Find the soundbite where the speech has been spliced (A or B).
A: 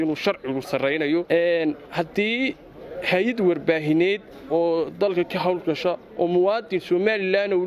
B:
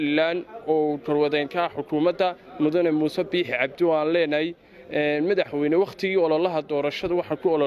A